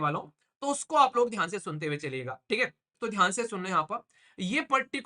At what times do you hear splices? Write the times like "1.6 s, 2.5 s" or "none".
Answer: 2.9 s